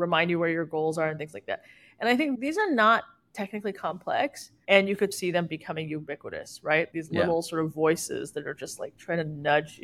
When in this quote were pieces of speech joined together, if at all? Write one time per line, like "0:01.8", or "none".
0:02.4
0:05.1
0:06.9